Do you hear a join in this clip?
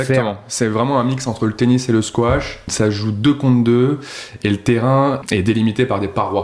yes; 2 cuts; at 2.7 s, 5.2 s

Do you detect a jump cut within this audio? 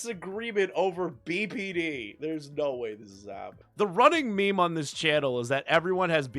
yes; 1 cut; at 3.6 s

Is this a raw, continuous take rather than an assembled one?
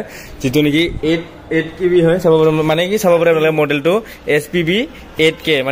yes; 0 cuts

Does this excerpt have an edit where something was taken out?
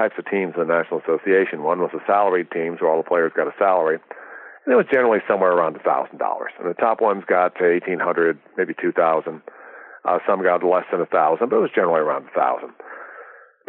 no; 0 cuts

